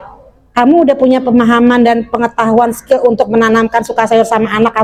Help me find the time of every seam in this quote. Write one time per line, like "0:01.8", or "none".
none